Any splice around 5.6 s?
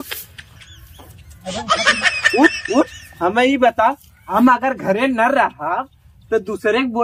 no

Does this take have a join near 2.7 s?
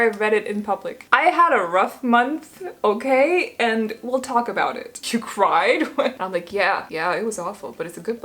no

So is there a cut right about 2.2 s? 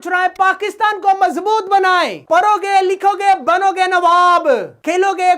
yes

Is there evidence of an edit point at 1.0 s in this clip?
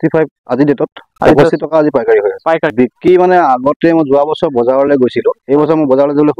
no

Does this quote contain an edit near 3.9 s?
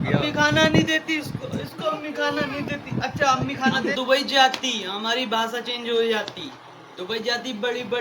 yes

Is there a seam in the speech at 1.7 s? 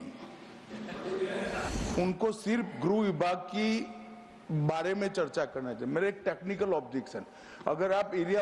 yes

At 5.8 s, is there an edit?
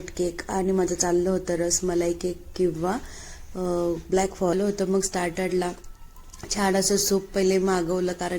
no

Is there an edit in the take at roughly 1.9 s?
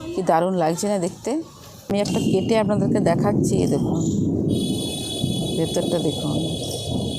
yes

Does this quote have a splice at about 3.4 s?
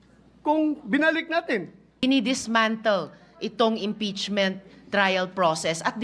no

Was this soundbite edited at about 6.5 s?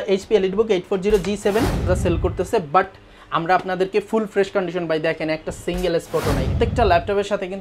yes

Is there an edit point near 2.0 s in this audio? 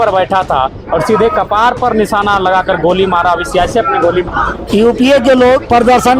no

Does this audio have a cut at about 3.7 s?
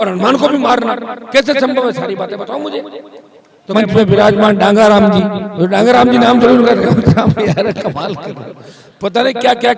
yes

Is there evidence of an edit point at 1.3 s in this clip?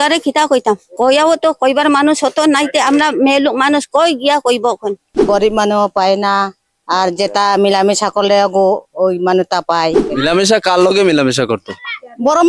no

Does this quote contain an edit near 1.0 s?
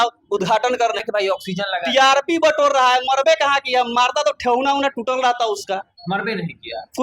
yes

